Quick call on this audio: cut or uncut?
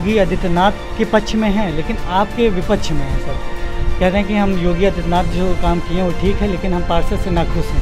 uncut